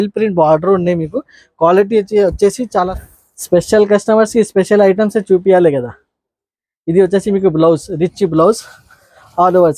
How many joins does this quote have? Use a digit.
1